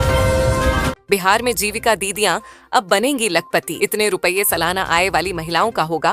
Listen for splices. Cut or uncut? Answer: cut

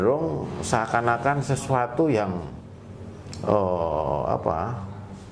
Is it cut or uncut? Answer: uncut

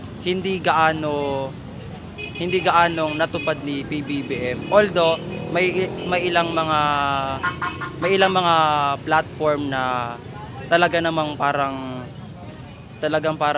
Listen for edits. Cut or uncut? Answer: uncut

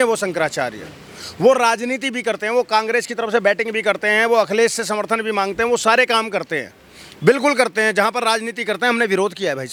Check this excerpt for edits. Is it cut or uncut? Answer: uncut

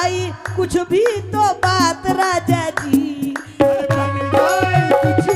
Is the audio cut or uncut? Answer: uncut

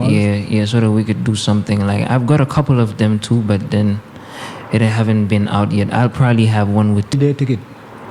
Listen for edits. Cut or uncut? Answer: cut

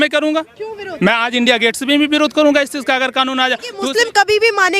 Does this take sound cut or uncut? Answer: cut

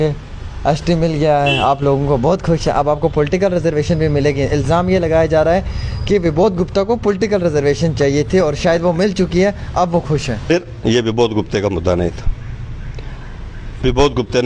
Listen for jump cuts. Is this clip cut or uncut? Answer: uncut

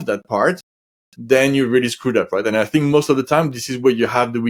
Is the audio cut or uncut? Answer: uncut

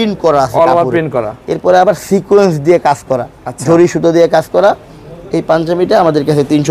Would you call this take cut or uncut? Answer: uncut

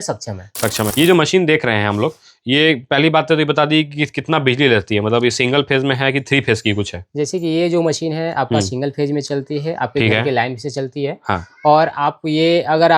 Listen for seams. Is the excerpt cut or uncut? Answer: cut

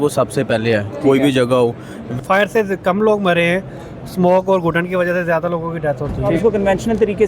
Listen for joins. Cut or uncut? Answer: cut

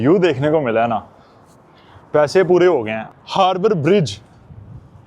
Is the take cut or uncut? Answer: cut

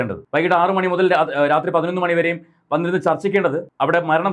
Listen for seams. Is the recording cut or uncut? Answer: uncut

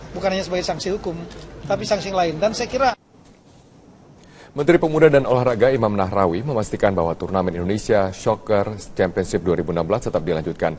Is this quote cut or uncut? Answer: cut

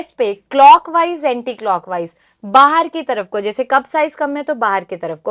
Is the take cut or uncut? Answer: uncut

